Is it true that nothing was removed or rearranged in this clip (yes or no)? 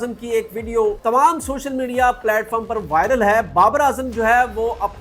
no